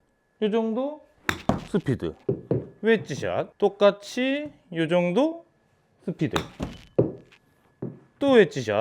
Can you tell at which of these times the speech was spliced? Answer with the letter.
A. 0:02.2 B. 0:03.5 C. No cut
B